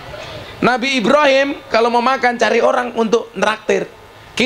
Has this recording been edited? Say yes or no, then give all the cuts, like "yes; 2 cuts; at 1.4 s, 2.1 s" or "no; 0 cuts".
no; 0 cuts